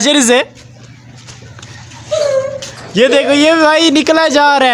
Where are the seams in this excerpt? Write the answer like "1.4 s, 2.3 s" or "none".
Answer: none